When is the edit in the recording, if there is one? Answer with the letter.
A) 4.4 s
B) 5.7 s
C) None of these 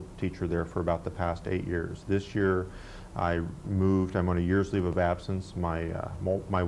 A